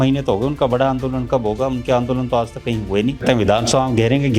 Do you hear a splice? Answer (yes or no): yes